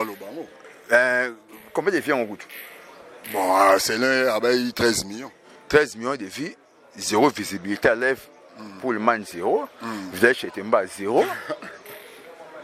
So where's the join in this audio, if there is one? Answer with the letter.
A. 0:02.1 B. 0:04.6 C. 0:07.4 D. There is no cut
D